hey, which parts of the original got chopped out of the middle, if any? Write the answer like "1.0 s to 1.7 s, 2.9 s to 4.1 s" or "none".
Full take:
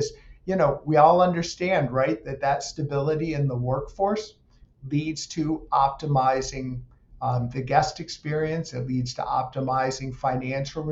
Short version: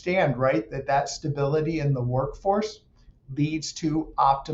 none